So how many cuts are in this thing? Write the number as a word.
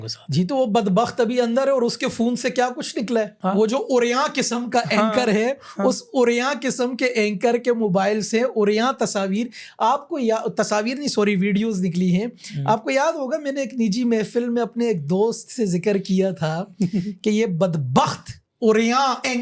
zero